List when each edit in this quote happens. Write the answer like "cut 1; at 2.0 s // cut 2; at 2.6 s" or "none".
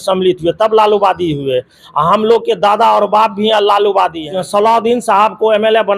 cut 1; at 4.2 s

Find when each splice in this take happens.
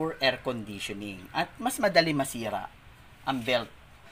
none

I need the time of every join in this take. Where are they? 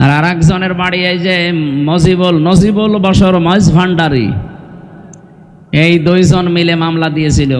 none

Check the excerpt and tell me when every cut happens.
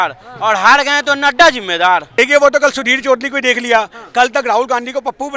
cut 1; at 2.1 s

